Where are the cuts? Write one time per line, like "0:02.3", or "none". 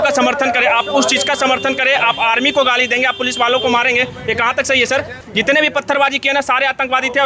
0:05.2